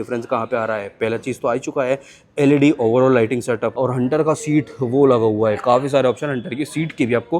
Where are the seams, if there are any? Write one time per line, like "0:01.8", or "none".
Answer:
0:03.8